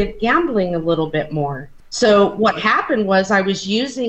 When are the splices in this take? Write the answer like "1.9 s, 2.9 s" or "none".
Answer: 1.8 s